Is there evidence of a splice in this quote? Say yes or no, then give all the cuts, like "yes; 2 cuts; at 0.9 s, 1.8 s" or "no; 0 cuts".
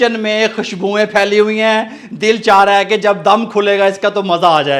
no; 0 cuts